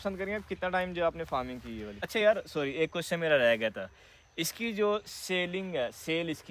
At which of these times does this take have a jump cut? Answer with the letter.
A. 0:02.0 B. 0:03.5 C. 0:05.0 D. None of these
A